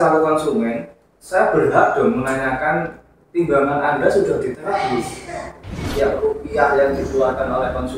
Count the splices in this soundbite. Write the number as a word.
one